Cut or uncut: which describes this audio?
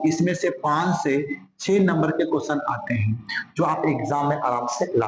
uncut